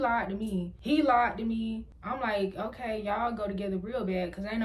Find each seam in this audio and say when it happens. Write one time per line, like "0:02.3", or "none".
none